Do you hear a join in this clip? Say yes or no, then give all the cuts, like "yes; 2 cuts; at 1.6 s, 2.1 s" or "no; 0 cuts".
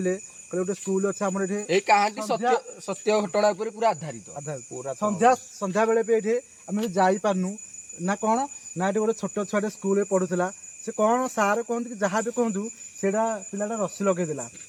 no; 0 cuts